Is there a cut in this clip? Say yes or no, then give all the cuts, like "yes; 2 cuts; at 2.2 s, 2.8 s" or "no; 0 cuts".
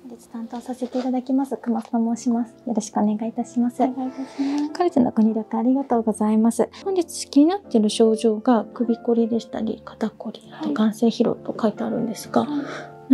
yes; 1 cut; at 6.8 s